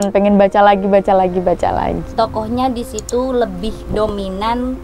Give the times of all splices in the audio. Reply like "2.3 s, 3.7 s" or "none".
2.0 s